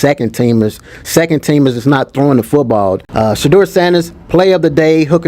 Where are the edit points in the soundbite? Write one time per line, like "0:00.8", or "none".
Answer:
0:03.0